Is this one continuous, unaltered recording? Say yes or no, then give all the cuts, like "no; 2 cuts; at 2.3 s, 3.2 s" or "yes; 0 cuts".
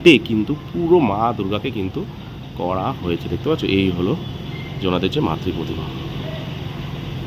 yes; 0 cuts